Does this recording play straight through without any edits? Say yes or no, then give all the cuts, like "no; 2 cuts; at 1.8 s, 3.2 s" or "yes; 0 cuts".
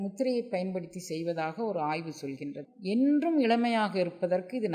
no; 1 cut; at 2.7 s